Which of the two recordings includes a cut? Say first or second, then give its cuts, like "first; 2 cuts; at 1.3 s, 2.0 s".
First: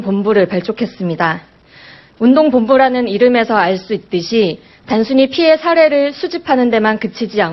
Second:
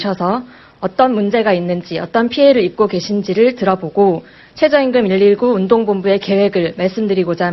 second; 1 cut; at 6.3 s